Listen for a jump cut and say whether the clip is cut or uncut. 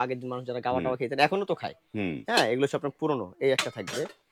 uncut